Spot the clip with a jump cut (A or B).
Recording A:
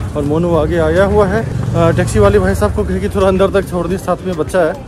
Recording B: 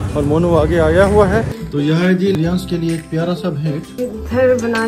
B